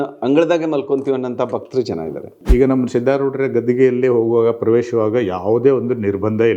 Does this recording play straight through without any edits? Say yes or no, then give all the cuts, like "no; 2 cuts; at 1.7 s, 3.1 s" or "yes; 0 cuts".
no; 1 cut; at 2.3 s